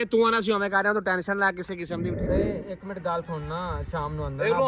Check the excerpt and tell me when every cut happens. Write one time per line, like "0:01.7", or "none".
0:02.2